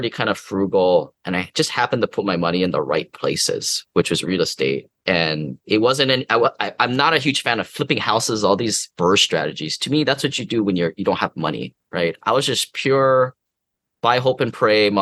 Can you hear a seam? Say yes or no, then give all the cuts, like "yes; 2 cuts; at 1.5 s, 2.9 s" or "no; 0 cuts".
no; 0 cuts